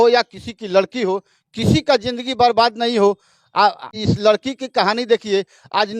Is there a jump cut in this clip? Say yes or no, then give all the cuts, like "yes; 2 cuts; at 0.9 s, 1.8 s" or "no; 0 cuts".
yes; 1 cut; at 4.0 s